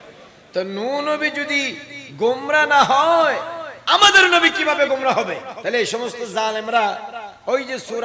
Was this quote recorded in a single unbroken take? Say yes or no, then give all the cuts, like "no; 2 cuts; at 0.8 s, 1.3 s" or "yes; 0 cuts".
no; 1 cut; at 5.5 s